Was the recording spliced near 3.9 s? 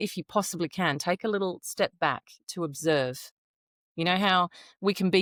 no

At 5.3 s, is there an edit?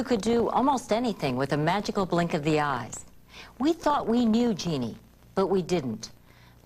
no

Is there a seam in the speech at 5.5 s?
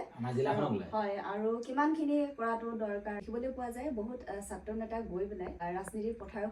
yes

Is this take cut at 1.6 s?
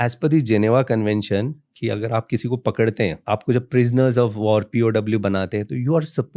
no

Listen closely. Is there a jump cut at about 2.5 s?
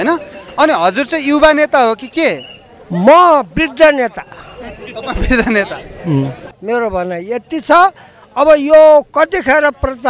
no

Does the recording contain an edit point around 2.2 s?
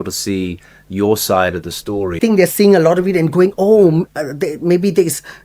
yes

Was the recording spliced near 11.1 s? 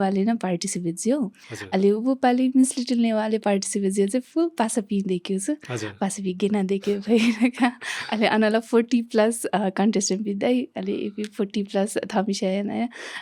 no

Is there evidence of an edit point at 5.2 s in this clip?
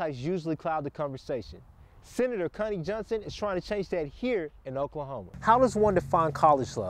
yes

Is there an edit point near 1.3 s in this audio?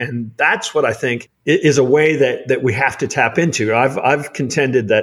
yes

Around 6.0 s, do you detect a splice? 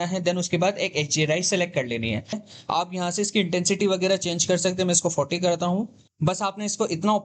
yes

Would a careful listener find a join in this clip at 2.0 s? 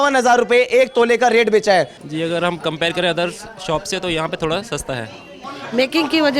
yes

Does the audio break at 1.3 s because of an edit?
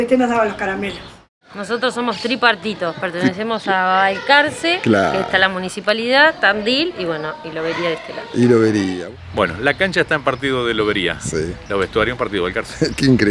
yes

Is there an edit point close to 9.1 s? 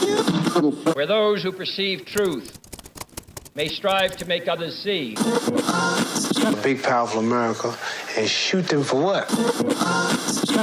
no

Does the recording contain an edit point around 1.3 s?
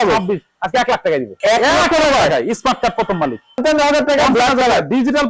yes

